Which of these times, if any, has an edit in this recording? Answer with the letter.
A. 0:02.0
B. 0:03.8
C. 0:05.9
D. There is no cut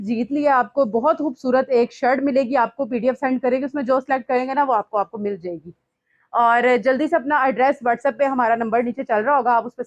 D